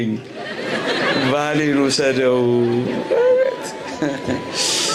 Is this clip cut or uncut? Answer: uncut